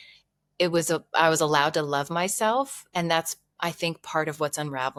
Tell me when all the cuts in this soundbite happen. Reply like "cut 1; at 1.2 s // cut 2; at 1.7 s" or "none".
none